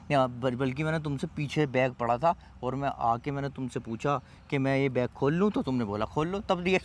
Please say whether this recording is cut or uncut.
uncut